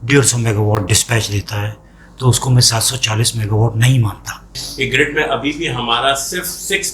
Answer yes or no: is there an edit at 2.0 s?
no